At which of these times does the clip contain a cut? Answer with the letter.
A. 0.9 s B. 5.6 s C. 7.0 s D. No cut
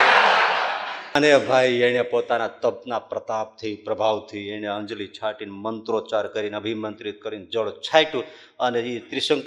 A